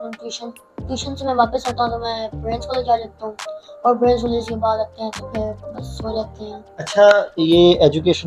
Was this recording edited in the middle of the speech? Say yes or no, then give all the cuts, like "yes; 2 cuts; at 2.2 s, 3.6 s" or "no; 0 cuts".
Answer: no; 0 cuts